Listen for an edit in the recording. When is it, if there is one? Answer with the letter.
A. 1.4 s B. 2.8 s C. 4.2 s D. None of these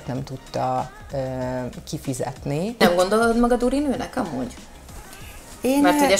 B